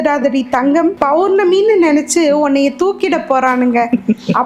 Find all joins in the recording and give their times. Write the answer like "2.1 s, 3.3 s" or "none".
1.0 s